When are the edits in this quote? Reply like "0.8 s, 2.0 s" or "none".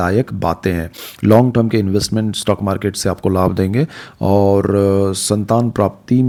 none

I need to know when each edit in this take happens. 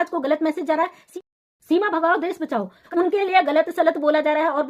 1.0 s, 2.8 s

